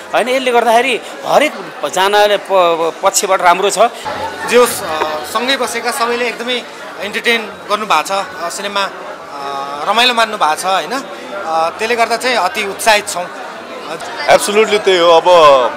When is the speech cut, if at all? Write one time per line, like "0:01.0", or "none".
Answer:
0:04.0
0:14.0